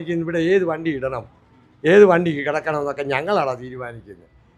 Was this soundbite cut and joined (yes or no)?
no